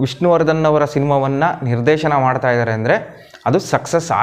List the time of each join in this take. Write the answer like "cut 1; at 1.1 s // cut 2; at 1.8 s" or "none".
none